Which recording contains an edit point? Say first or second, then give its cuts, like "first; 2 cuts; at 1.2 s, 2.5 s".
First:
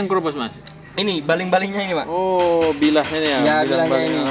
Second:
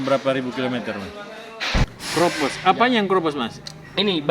second; 1 cut; at 2.0 s